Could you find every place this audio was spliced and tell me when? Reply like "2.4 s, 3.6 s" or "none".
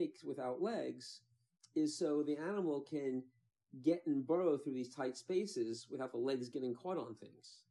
none